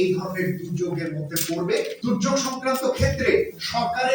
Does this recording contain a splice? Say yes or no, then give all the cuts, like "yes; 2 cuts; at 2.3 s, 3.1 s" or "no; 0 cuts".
yes; 1 cut; at 1.9 s